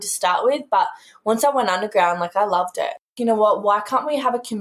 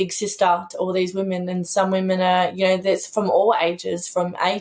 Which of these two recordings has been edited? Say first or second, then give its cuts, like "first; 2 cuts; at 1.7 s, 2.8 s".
first; 1 cut; at 3.1 s